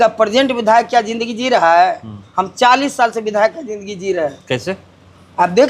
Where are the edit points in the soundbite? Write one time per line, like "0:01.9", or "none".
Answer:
none